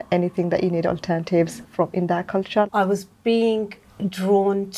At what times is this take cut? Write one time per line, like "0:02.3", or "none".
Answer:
0:01.6
0:02.7